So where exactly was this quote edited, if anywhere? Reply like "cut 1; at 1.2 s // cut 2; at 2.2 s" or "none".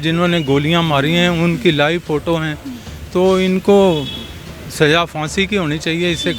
none